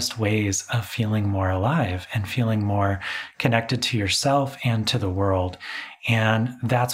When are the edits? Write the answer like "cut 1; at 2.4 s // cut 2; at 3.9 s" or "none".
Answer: none